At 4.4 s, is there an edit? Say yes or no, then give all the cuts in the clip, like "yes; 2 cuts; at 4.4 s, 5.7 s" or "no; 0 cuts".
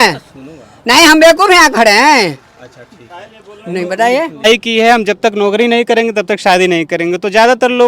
yes; 1 cut; at 4.4 s